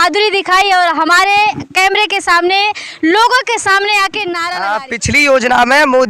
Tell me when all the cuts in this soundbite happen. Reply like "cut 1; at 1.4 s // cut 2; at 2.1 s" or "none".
cut 1; at 4.5 s